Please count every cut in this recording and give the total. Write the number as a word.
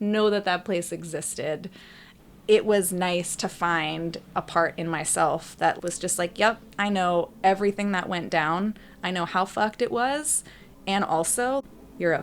one